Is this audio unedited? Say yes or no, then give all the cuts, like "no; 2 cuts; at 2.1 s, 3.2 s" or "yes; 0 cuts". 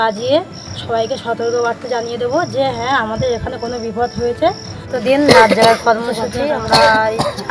no; 1 cut; at 4.7 s